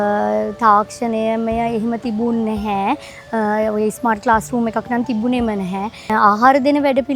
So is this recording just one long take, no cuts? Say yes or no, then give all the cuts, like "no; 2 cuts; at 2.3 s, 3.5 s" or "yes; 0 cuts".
no; 1 cut; at 6.1 s